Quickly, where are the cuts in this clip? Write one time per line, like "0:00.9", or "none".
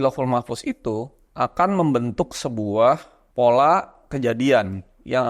0:01.2
0:03.2